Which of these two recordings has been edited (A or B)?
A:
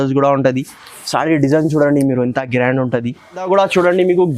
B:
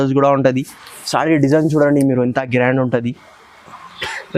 A